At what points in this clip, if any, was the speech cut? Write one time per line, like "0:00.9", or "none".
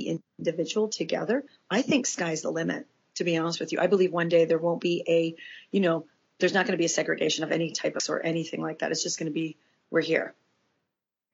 0:04.8
0:08.0